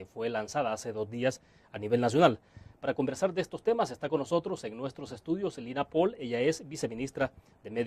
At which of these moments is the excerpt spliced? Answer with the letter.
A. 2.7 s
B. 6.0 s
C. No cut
B